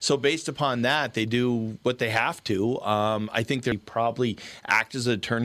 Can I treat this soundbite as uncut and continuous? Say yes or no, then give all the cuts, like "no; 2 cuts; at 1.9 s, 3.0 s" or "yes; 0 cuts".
no; 1 cut; at 3.7 s